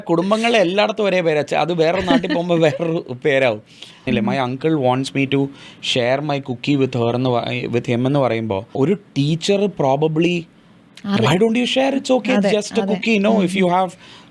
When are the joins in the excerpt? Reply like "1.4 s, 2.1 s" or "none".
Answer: 4.0 s, 8.7 s